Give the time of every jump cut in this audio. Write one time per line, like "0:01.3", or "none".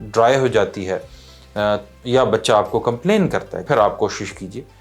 0:03.6